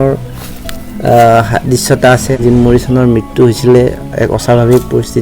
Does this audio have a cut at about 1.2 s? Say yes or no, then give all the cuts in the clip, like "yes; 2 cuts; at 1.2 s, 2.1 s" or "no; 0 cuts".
no; 1 cut; at 2.4 s